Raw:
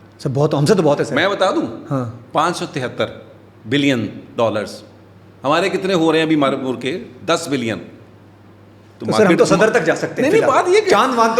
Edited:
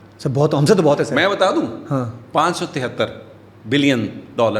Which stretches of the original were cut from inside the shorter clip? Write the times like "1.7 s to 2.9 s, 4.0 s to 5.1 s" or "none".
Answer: none